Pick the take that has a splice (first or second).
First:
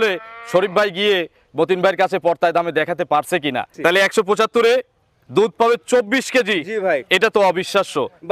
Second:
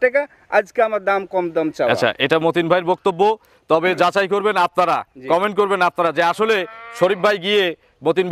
first